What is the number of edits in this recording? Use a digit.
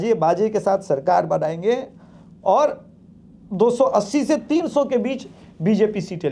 0